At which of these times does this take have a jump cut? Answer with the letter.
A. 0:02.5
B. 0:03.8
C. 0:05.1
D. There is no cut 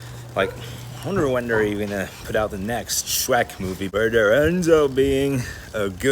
B